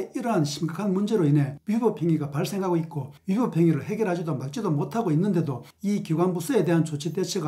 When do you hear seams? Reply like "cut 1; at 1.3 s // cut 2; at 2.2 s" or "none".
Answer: none

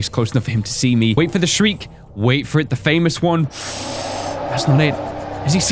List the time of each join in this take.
cut 1; at 1.2 s

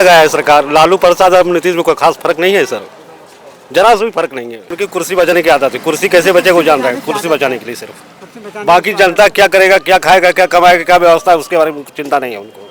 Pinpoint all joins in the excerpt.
cut 1; at 4.8 s

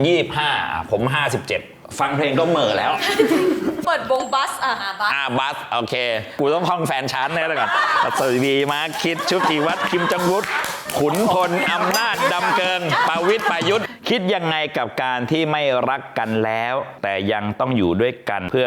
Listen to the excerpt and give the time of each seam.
cut 1; at 3.8 s // cut 2; at 6.3 s // cut 3; at 13.9 s

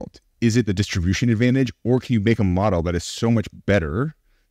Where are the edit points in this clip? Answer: none

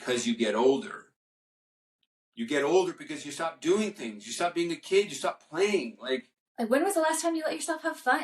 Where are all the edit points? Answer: cut 1; at 6.4 s

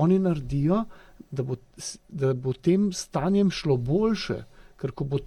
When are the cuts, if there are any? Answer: none

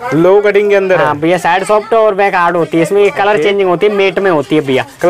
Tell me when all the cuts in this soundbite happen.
none

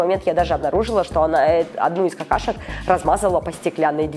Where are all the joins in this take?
none

